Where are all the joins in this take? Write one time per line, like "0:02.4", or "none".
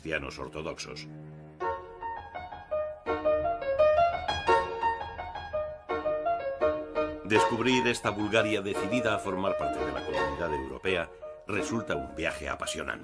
none

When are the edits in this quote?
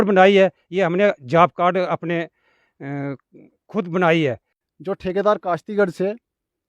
0:04.6

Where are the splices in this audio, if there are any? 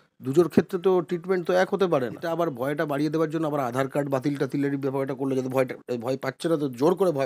0:02.3

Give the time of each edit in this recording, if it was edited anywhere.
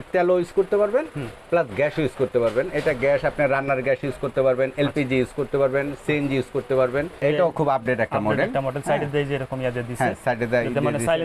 0:07.2

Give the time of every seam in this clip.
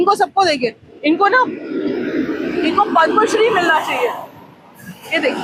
none

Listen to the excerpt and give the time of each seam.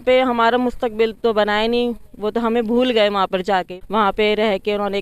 0:01.1
0:03.7

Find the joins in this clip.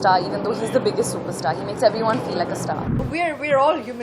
0:02.9

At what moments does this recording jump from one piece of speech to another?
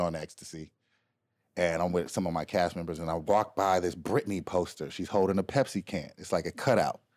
none

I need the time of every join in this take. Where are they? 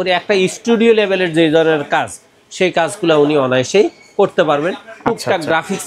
none

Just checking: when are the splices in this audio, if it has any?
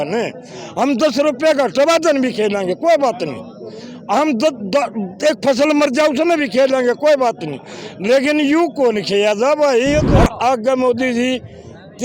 0:10.1

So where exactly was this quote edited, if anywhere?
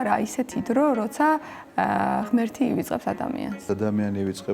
0:03.6

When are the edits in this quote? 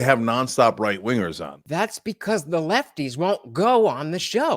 0:01.7

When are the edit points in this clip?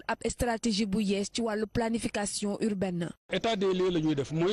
0:03.5

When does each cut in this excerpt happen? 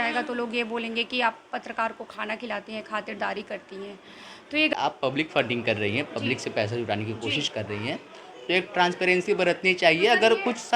0:04.7

